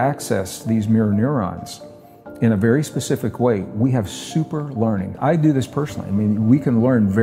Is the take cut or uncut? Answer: cut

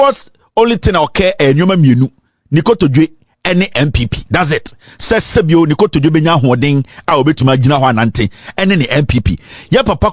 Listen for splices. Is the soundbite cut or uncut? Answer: uncut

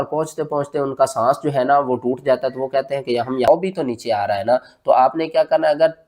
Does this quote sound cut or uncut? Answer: cut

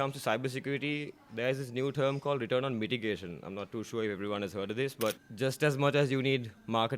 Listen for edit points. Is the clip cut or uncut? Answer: cut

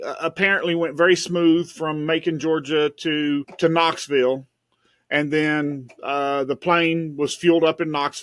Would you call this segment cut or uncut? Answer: cut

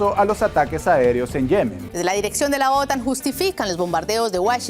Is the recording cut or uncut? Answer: cut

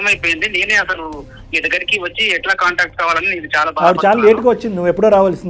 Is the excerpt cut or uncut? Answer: cut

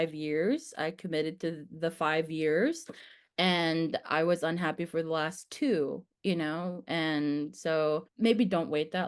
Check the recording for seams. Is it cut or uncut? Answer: cut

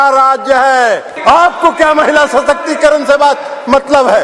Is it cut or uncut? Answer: cut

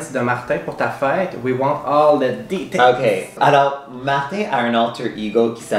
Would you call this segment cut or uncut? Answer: uncut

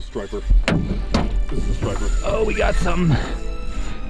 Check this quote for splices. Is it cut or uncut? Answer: uncut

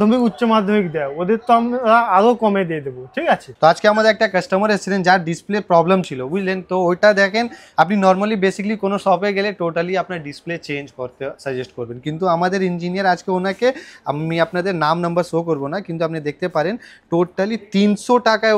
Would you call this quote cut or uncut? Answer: cut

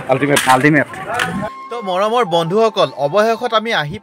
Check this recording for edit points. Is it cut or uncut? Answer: uncut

